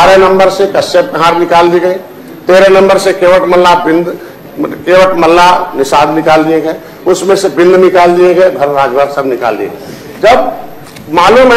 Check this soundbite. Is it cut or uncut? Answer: uncut